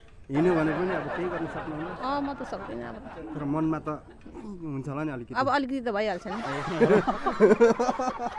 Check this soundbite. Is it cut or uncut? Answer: uncut